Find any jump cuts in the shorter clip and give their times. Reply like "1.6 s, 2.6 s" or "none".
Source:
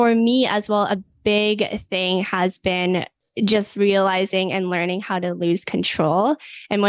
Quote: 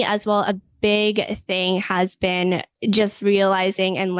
2.7 s